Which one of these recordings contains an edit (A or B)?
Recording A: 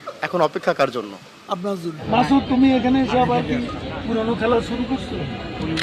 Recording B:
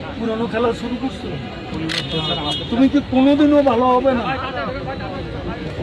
A